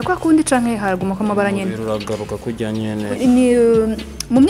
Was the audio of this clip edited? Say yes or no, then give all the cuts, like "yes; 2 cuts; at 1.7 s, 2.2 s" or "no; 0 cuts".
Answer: yes; 1 cut; at 3.2 s